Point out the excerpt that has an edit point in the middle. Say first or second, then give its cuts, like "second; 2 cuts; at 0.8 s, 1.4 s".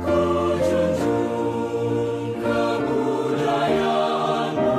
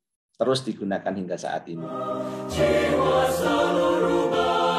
second; 1 cut; at 1.8 s